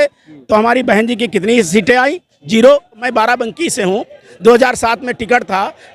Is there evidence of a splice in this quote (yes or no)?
yes